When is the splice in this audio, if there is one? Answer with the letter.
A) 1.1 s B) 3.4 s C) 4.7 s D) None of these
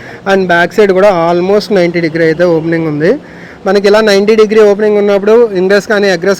D